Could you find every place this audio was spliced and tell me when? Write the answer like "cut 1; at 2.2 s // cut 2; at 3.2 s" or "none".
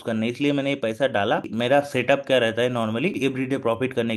cut 1; at 1.5 s // cut 2; at 3.2 s